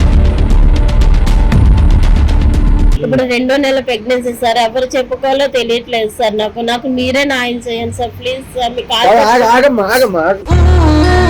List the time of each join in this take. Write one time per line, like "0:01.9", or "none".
0:02.9